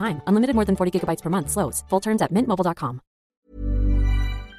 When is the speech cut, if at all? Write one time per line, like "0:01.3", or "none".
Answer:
0:03.3